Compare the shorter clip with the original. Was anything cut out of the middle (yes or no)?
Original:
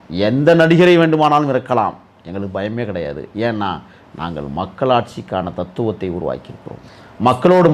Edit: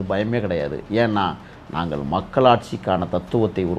no